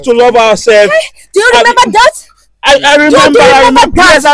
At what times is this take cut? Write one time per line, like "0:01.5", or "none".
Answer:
none